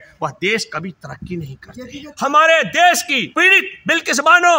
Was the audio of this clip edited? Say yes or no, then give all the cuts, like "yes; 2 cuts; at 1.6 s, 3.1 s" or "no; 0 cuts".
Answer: yes; 2 cuts; at 2.0 s, 3.3 s